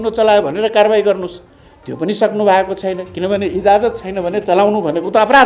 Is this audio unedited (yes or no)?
yes